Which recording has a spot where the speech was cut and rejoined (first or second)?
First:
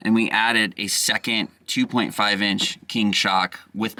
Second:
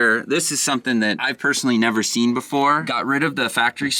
second